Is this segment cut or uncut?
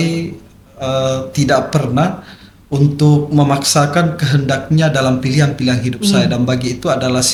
uncut